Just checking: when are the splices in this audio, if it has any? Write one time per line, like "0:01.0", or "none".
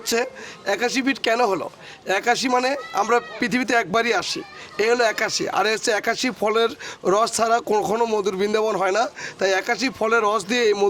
none